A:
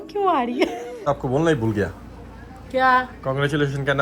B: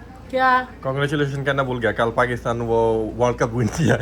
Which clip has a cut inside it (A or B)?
A